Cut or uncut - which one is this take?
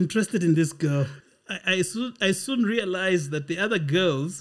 cut